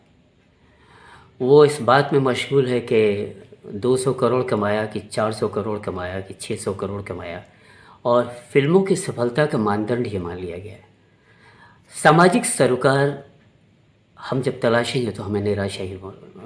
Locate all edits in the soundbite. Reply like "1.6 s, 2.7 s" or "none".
none